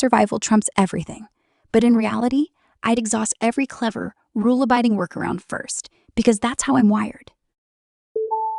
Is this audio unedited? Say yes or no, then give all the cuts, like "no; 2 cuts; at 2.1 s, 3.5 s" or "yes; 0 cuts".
no; 1 cut; at 7.5 s